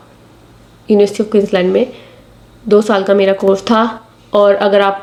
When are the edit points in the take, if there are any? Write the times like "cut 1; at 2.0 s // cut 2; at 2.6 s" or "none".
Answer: none